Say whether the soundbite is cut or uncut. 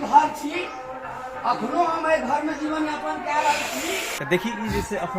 cut